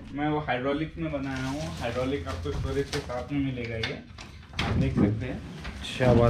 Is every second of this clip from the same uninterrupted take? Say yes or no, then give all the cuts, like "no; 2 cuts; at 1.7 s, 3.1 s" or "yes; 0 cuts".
yes; 0 cuts